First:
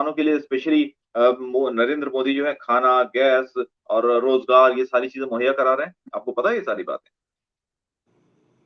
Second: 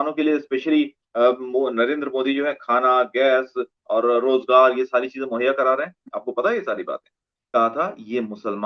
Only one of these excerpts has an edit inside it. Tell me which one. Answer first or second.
second